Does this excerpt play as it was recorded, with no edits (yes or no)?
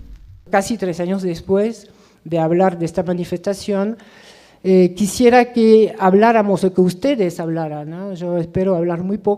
no